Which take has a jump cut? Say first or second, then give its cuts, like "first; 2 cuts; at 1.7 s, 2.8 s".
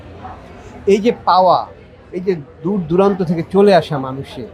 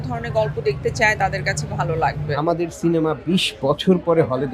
second; 1 cut; at 2.3 s